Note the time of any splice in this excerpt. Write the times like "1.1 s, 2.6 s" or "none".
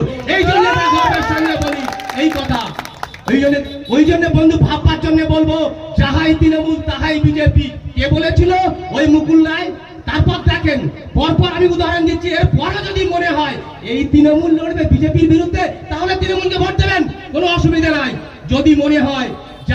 none